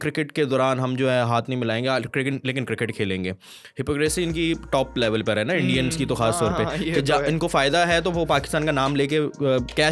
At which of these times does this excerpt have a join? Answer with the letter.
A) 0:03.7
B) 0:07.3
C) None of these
C